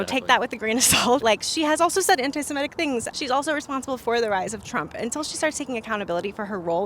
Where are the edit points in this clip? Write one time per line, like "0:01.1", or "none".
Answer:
0:01.2
0:03.1